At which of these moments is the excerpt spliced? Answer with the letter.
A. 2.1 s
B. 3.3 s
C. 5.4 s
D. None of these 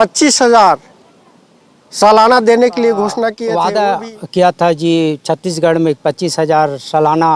B